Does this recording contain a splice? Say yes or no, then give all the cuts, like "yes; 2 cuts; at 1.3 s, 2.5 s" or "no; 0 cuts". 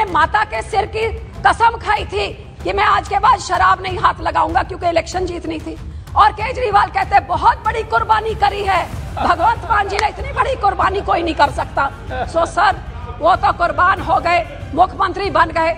no; 0 cuts